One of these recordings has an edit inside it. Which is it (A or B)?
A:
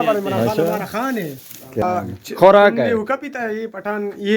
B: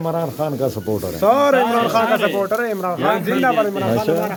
A